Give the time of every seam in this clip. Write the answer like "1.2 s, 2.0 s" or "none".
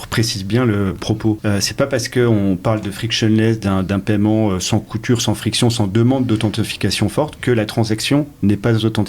1.1 s